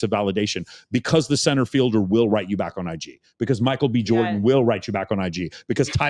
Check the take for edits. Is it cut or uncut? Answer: uncut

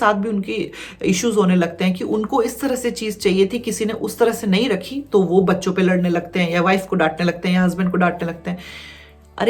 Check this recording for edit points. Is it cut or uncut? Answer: uncut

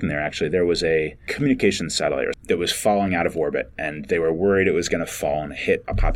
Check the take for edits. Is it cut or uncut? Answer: cut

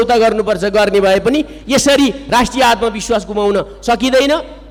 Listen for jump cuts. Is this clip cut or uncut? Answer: uncut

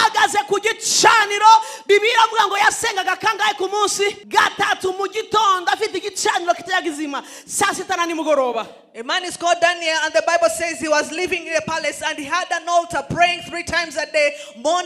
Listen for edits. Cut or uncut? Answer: cut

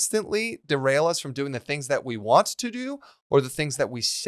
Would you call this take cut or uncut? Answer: uncut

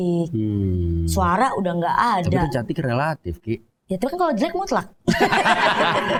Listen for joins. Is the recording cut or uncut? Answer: uncut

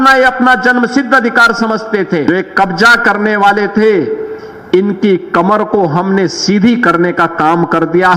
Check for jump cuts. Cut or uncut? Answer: cut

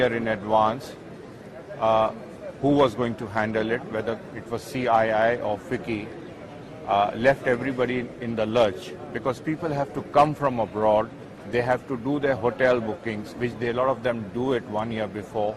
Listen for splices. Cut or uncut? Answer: uncut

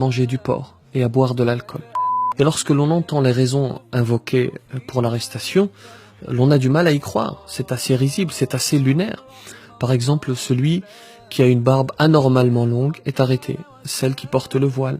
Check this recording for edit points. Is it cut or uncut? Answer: cut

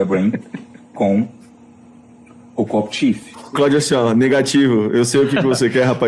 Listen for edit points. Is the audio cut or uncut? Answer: cut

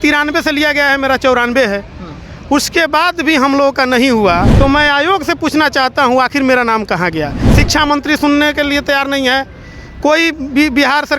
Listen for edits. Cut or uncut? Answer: cut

